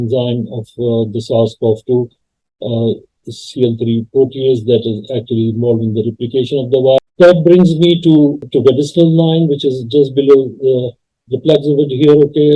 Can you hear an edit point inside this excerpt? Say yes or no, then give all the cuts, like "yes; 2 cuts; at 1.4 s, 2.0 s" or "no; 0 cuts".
yes; 1 cut; at 7.0 s